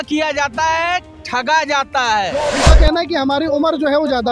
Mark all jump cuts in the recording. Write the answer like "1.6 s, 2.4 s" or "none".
2.5 s